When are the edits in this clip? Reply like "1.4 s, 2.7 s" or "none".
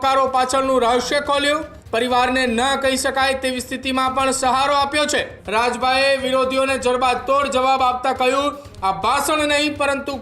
1.8 s, 5.4 s